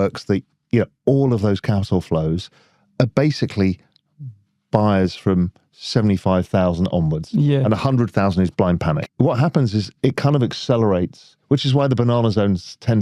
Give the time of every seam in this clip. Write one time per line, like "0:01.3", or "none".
0:09.0